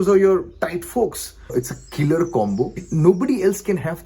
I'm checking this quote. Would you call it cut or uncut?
cut